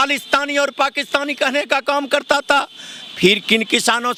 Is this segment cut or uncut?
uncut